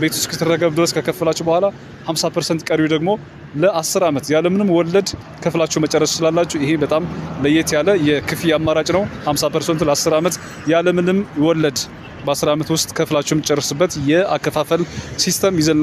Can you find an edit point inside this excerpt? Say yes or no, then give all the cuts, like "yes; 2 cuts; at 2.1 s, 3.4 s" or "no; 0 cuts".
no; 0 cuts